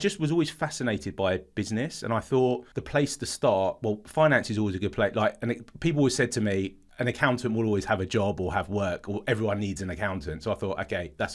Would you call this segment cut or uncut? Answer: cut